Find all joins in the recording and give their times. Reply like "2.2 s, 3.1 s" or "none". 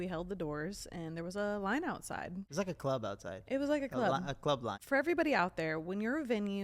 2.4 s, 4.8 s